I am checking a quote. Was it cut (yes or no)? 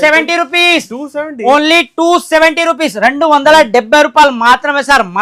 no